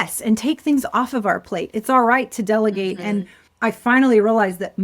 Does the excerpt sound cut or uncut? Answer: cut